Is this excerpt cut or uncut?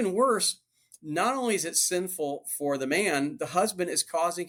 uncut